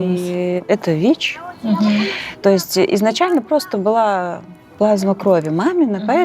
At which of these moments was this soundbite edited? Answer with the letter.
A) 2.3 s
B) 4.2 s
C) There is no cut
A